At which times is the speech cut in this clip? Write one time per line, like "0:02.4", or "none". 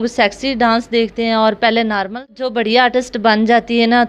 0:02.3